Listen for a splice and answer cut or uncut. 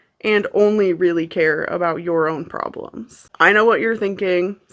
cut